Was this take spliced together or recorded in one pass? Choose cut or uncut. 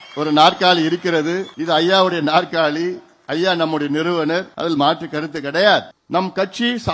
cut